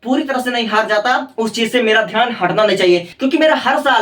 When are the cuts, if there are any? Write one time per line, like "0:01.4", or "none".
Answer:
0:03.1